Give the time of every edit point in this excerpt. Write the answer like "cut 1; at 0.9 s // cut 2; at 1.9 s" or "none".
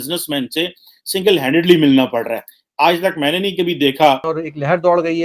cut 1; at 4.3 s

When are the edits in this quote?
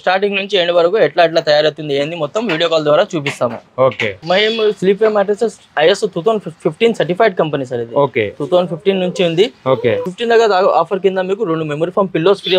cut 1; at 4.1 s // cut 2; at 10.1 s

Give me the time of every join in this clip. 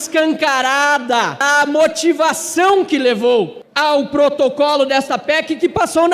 cut 1; at 1.4 s // cut 2; at 3.6 s

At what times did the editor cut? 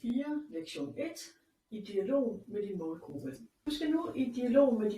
cut 1; at 3.7 s

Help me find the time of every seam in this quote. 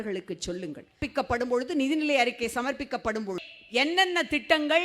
cut 1; at 1.0 s // cut 2; at 3.4 s

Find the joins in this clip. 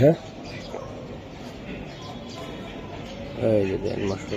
none

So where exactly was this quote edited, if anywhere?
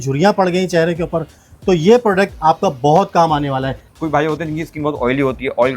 cut 1; at 3.9 s

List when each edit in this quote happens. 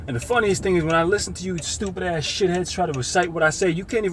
cut 1; at 2.7 s

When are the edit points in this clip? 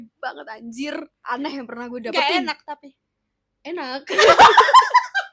cut 1; at 1.2 s

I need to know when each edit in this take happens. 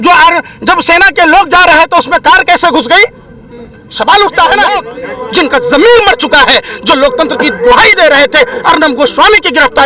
cut 1; at 5.0 s

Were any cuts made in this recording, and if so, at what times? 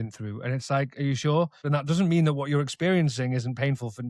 cut 1; at 1.6 s

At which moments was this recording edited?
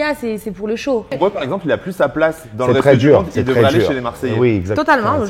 cut 1; at 1.1 s

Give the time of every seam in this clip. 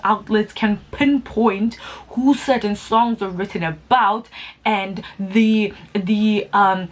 none

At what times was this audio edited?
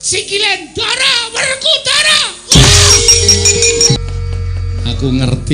cut 1; at 4.0 s

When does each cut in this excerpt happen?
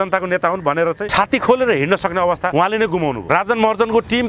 cut 1; at 2.5 s // cut 2; at 3.3 s

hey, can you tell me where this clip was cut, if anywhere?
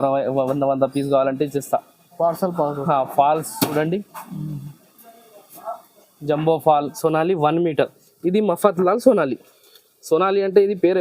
cut 1; at 6.9 s

